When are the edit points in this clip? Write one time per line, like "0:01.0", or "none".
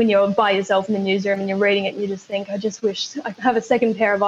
none